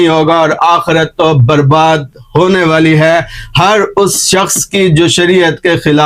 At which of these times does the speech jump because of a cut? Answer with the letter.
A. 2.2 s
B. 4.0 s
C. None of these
C